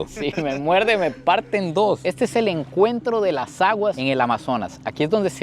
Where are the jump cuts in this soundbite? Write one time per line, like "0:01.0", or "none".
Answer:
0:02.0